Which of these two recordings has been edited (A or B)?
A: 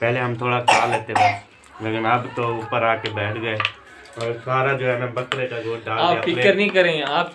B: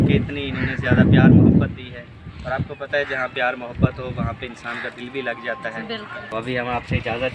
B